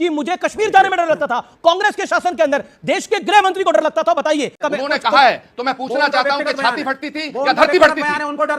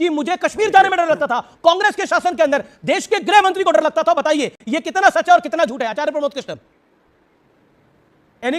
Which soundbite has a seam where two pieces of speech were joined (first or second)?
first